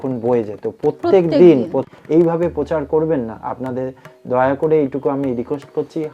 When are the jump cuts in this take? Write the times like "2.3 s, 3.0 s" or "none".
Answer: 1.9 s